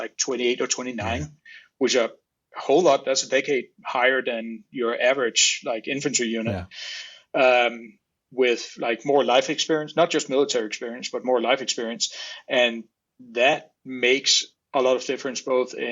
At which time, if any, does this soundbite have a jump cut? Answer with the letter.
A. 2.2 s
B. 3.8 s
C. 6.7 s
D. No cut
D